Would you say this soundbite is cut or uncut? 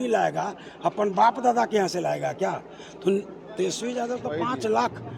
uncut